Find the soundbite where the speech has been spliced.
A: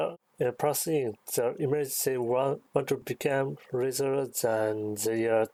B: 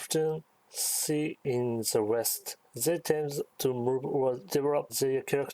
B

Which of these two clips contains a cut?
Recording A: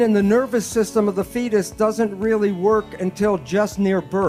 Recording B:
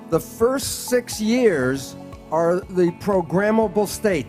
B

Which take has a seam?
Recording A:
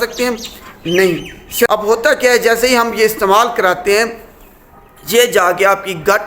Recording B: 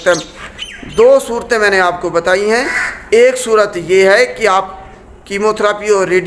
A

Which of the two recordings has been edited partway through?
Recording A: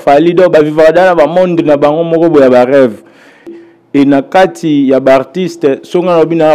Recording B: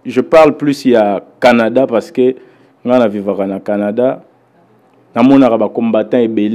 A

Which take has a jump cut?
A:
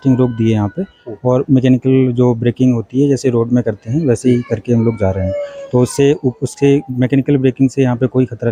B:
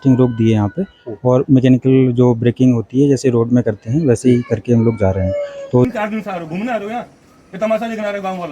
B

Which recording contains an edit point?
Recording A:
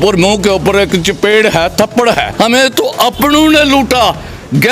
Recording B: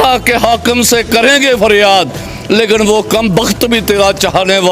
A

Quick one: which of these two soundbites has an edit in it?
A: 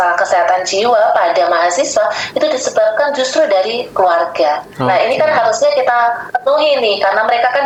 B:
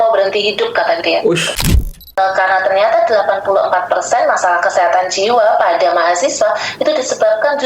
B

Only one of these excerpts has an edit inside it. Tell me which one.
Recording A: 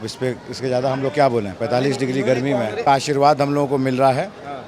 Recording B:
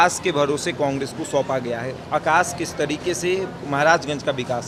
A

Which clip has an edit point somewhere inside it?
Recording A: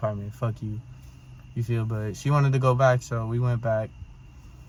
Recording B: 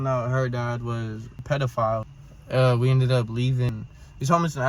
B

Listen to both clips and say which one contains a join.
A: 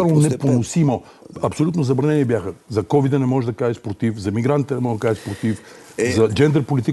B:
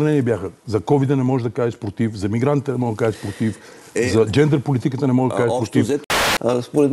B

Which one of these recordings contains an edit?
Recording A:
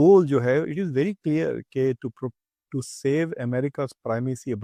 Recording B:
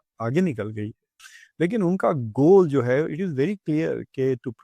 B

